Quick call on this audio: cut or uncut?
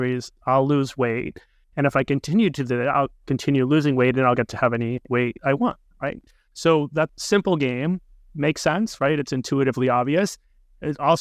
cut